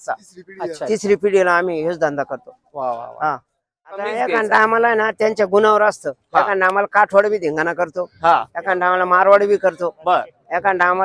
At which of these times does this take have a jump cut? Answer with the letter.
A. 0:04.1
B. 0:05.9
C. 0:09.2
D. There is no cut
A